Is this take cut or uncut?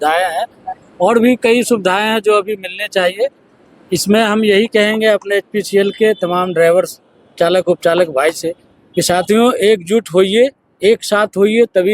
uncut